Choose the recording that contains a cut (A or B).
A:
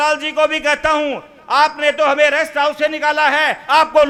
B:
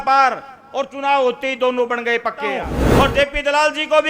B